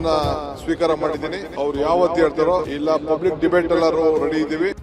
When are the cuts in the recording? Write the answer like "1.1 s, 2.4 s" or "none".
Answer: 1.4 s, 2.7 s